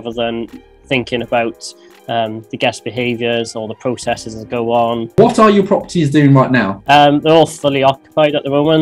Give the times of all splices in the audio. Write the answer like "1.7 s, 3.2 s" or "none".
5.2 s, 6.8 s